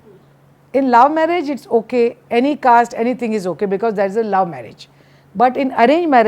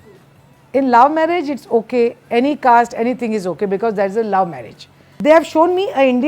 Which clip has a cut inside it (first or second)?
second